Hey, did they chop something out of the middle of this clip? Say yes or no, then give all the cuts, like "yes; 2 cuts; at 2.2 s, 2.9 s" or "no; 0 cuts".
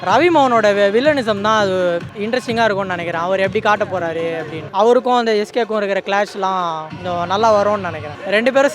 no; 0 cuts